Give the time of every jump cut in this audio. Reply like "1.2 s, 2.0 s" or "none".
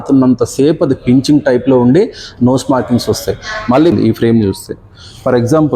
3.9 s